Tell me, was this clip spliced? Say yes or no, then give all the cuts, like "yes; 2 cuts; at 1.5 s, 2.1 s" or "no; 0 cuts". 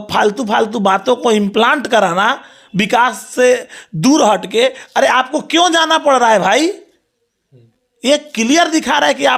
no; 0 cuts